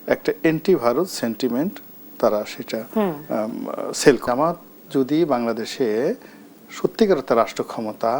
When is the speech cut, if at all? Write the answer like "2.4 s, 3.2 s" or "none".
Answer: 4.2 s